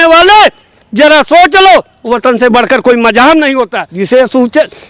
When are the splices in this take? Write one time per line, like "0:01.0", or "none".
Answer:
0:03.8